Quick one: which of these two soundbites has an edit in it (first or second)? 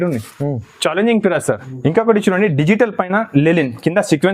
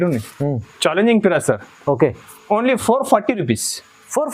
first